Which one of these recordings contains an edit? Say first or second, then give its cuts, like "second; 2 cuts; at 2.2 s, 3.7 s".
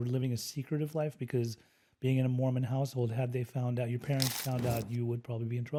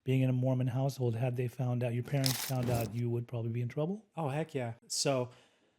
second; 1 cut; at 4.8 s